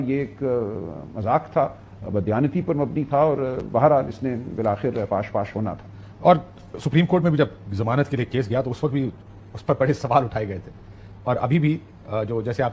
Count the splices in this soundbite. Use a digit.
0